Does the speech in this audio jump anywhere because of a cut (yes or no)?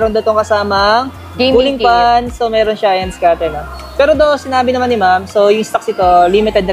no